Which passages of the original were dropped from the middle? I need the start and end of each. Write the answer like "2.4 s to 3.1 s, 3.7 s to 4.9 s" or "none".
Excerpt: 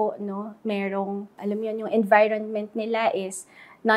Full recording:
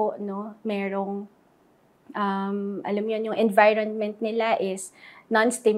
1.3 s to 2.8 s